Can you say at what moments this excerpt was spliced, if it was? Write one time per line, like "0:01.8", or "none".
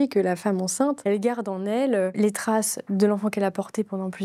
0:01.0
0:02.1